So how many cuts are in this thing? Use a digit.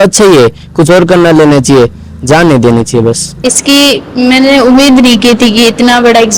1